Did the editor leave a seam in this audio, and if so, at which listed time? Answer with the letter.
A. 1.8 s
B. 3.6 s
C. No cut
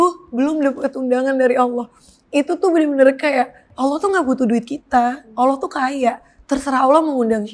B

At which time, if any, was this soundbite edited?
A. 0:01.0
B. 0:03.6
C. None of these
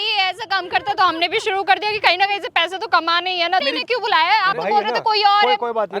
B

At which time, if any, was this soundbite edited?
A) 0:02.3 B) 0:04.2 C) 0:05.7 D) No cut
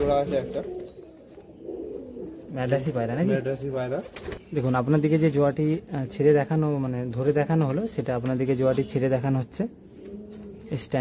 B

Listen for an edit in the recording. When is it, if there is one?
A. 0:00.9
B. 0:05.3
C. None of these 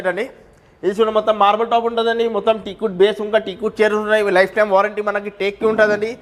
C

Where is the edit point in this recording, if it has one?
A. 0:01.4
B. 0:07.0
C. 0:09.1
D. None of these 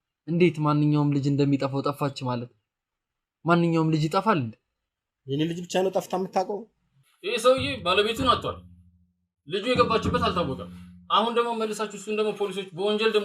B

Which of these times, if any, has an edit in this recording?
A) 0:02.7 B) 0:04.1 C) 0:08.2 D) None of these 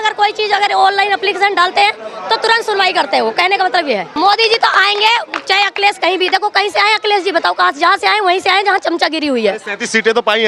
B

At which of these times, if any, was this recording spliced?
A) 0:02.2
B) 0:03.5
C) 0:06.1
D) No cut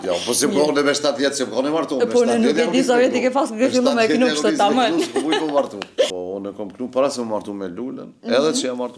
C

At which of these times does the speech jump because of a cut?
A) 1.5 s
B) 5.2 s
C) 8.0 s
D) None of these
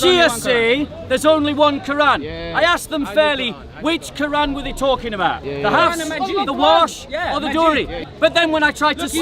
C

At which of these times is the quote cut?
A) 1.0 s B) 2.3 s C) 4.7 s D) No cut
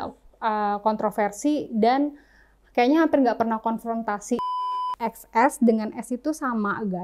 C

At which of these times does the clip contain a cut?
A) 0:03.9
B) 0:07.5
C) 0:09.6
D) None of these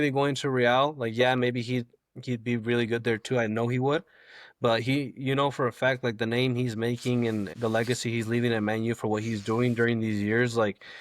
B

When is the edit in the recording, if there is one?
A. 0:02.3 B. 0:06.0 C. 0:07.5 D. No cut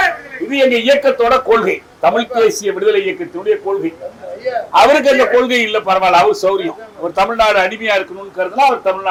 D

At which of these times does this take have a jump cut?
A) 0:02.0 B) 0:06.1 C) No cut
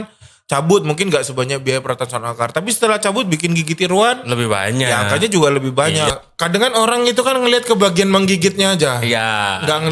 B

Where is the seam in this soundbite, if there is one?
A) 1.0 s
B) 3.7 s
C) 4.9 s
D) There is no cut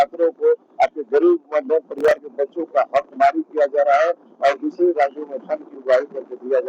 D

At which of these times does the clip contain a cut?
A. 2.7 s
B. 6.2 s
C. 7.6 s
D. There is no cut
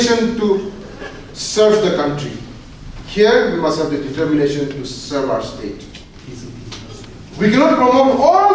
B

